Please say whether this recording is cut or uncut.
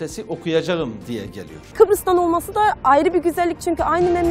cut